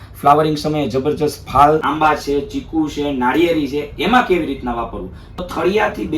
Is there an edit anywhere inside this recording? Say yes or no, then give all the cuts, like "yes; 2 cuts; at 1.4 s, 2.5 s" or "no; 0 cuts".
yes; 2 cuts; at 1.9 s, 5.4 s